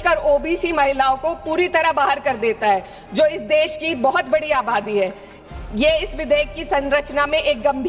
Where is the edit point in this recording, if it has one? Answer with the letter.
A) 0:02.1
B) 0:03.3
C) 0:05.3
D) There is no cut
D